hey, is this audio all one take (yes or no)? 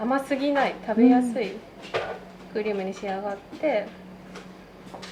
yes